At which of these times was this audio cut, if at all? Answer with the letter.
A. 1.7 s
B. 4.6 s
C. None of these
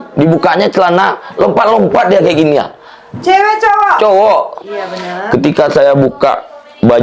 B